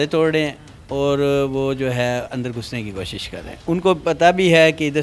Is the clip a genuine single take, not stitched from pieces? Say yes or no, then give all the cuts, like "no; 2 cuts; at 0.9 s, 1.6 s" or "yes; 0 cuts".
yes; 0 cuts